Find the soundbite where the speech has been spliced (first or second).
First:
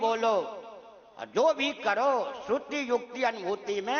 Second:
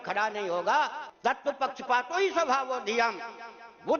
second